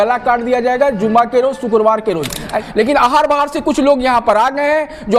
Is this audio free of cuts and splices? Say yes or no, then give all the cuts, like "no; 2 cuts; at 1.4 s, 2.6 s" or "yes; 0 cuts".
no; 1 cut; at 2.6 s